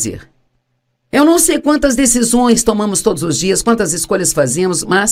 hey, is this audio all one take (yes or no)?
yes